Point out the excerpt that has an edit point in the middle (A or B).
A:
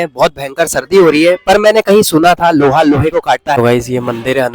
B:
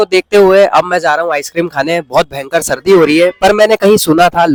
A